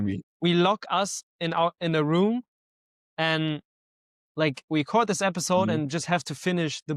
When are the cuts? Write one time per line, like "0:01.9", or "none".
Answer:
none